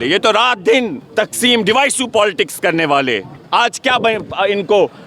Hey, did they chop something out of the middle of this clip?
yes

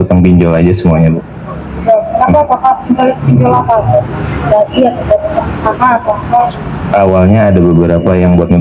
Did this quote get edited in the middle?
no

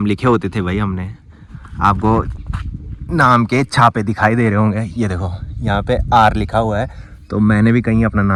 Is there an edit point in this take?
no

